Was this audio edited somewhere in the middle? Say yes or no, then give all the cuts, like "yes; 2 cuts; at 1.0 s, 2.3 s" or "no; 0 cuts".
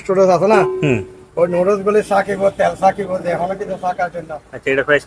no; 0 cuts